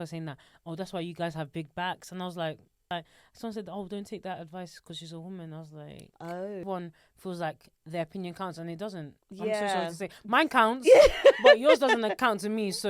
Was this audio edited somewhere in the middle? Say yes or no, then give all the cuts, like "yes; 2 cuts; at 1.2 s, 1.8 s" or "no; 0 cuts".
yes; 2 cuts; at 2.9 s, 6.6 s